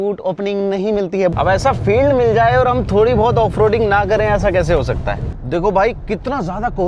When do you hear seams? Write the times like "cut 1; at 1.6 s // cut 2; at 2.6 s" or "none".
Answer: cut 1; at 1.3 s // cut 2; at 5.3 s